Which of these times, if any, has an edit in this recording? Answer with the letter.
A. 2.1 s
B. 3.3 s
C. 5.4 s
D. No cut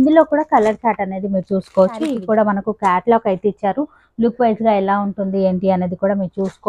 A